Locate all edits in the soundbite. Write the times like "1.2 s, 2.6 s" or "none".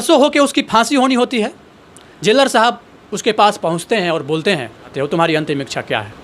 4.8 s